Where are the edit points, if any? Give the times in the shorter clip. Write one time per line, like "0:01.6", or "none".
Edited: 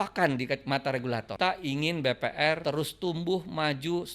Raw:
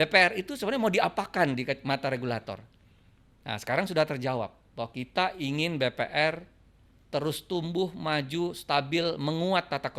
0:01.3
0:02.6